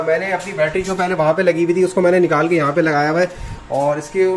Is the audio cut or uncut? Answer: uncut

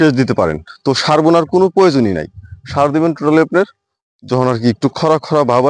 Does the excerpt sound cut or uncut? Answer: uncut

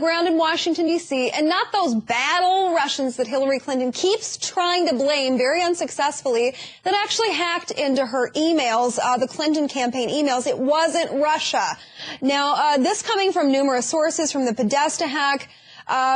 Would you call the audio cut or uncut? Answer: uncut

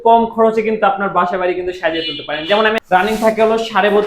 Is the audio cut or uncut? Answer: cut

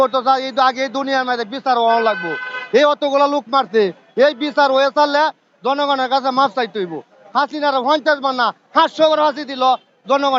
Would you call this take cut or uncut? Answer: uncut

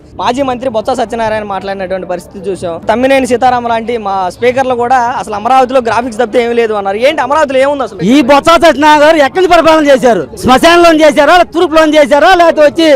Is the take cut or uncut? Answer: cut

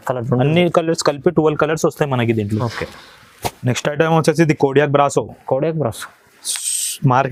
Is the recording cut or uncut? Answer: uncut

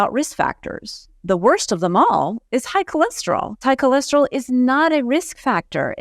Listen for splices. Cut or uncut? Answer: cut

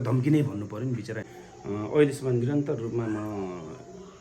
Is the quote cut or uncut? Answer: cut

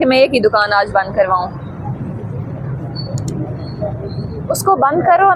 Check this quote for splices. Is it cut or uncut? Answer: uncut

